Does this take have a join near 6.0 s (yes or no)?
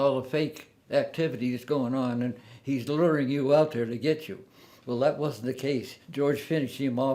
yes